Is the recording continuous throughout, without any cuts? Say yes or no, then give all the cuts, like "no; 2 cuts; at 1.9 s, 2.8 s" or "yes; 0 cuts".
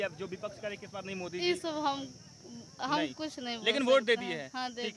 yes; 0 cuts